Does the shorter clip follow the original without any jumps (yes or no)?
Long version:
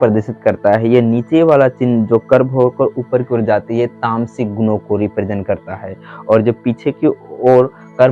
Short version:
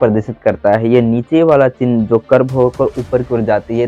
yes